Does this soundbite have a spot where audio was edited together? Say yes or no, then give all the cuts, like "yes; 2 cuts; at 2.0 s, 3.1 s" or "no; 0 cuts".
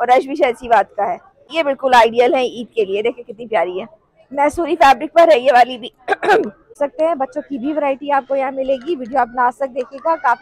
yes; 2 cuts; at 1.5 s, 6.8 s